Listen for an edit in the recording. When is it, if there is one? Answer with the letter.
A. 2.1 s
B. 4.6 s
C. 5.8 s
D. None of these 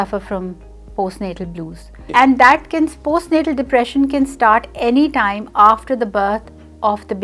A